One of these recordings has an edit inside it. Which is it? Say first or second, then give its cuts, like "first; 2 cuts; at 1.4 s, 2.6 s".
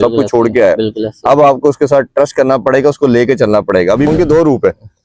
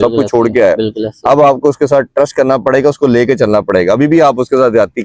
first; 1 cut; at 4.1 s